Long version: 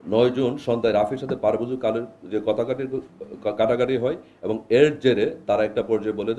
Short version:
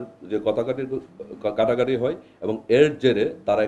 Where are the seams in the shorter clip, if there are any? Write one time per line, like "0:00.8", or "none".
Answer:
none